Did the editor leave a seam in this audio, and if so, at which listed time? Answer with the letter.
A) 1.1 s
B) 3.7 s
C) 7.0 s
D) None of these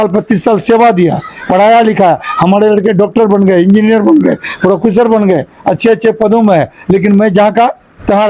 D